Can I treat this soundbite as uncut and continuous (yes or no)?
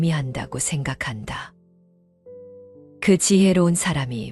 yes